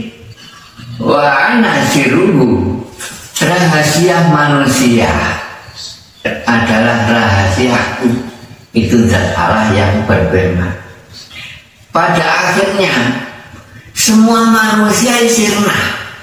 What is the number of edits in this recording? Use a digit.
0